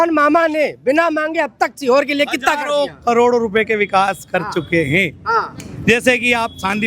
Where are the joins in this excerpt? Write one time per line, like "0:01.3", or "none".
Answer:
none